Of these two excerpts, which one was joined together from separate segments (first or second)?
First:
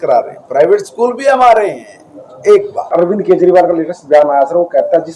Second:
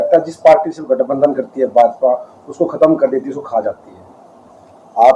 first